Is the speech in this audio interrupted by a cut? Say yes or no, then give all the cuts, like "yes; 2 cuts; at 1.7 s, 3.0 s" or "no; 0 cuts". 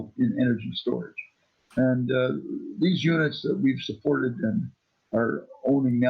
no; 0 cuts